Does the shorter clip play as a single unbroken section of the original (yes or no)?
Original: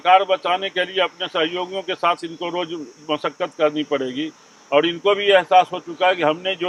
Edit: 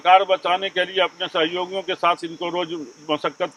yes